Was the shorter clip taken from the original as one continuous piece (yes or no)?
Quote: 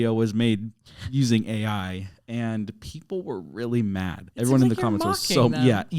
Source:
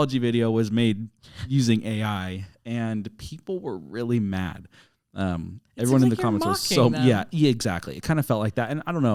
no